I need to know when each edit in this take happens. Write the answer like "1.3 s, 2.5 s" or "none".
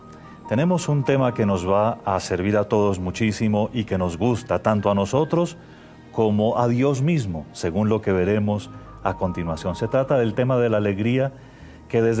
none